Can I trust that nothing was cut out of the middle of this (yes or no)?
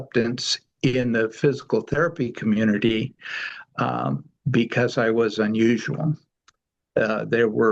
yes